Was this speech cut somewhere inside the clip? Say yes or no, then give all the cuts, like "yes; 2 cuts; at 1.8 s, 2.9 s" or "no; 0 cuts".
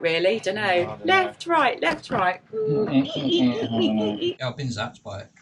yes; 1 cut; at 4.4 s